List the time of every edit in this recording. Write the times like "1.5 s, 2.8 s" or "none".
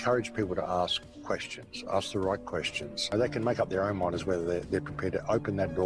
3.0 s